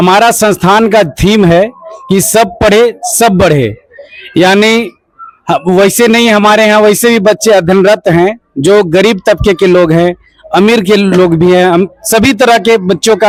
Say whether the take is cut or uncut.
uncut